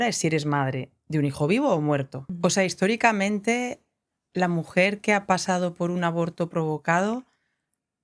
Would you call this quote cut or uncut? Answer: cut